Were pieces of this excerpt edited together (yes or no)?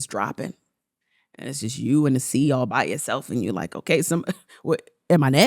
yes